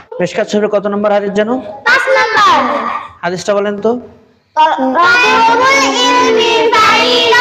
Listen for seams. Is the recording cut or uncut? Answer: uncut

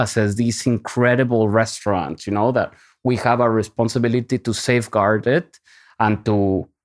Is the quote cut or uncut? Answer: uncut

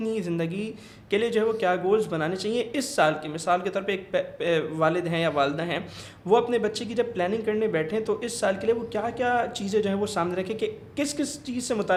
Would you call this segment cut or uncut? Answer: uncut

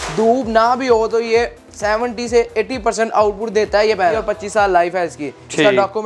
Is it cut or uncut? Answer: cut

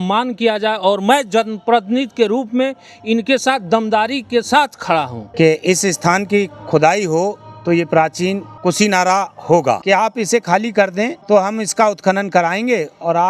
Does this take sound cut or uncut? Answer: cut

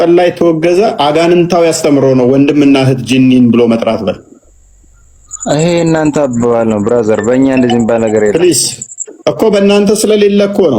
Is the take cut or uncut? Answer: uncut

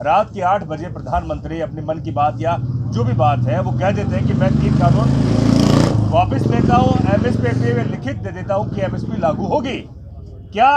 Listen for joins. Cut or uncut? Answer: uncut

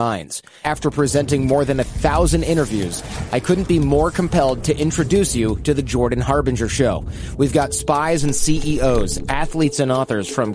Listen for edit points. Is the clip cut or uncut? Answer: uncut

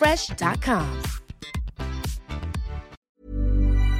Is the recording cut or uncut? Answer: cut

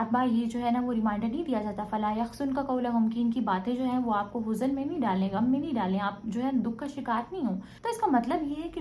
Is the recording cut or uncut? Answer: cut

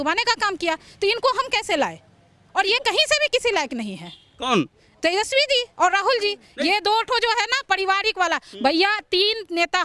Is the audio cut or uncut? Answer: uncut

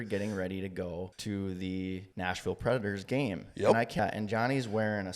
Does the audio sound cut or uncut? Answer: cut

